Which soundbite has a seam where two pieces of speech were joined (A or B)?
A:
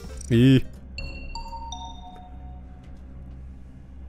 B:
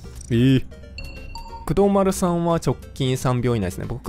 B